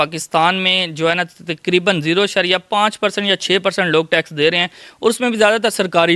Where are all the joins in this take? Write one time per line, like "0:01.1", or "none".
none